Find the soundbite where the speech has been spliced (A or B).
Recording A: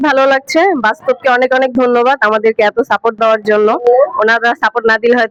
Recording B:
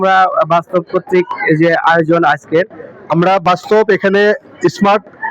B